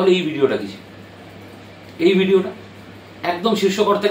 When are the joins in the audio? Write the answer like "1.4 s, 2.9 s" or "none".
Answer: none

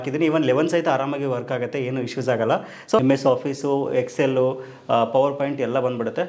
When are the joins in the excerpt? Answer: 3.0 s

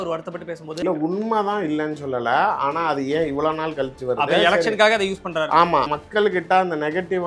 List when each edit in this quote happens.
0.8 s, 5.9 s

